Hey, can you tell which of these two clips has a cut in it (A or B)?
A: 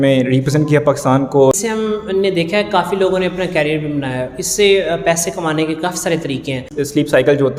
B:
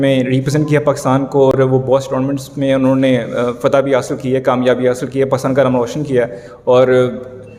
A